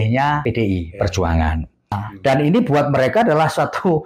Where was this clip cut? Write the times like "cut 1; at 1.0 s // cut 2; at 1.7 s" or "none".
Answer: cut 1; at 2.1 s